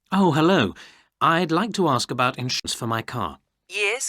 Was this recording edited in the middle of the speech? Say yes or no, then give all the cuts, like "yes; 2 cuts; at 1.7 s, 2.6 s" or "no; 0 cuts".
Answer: yes; 1 cut; at 2.6 s